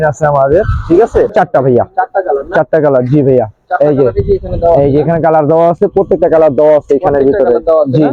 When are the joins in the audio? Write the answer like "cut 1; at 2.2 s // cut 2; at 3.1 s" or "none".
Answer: cut 1; at 1.3 s